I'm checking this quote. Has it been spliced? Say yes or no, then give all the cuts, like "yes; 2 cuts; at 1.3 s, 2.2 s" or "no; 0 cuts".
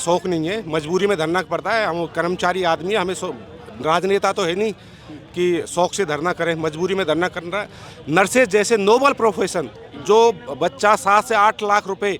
no; 0 cuts